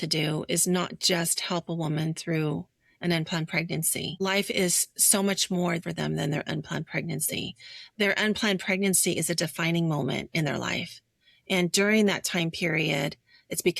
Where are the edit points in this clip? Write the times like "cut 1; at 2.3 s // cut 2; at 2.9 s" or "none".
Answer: cut 1; at 4.2 s // cut 2; at 5.8 s